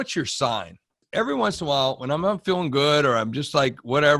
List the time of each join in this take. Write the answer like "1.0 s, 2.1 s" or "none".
1.0 s